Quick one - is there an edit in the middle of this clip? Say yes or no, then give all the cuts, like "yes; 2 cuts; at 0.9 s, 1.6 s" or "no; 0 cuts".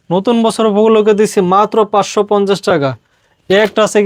no; 0 cuts